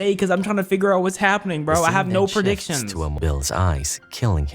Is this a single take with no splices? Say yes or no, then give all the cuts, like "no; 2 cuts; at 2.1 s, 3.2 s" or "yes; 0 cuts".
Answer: no; 1 cut; at 3.1 s